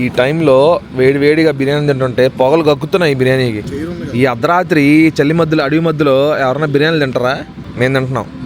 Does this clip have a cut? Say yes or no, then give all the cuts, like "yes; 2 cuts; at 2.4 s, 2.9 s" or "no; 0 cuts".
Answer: yes; 1 cut; at 3.7 s